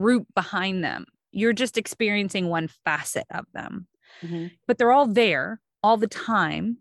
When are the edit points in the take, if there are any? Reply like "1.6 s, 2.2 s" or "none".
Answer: 4.6 s